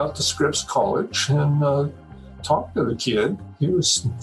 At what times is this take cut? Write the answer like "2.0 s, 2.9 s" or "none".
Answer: none